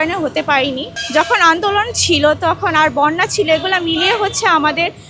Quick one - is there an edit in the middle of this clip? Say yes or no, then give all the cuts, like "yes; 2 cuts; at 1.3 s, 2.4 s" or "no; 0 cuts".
yes; 1 cut; at 0.9 s